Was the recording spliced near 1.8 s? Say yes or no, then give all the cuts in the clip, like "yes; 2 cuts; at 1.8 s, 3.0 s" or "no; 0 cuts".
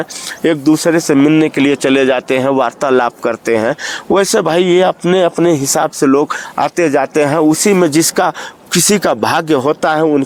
no; 0 cuts